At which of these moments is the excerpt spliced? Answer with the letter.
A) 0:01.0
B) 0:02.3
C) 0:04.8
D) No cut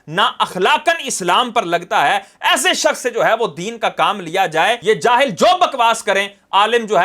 C